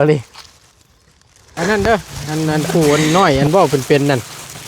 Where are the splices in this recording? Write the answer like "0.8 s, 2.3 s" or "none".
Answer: 1.5 s